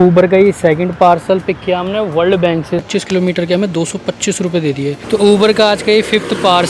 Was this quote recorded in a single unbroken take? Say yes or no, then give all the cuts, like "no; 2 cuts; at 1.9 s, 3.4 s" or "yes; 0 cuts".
no; 2 cuts; at 2.9 s, 5.0 s